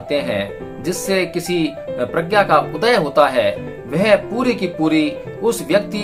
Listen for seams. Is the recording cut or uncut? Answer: uncut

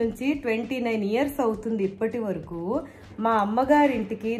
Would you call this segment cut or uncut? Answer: uncut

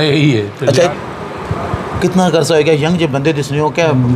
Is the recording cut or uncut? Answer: cut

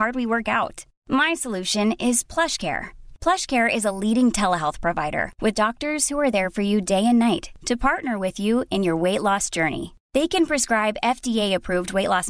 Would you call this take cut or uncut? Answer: uncut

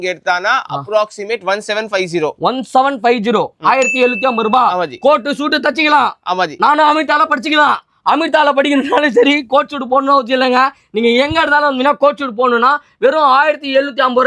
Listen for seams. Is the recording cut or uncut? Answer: uncut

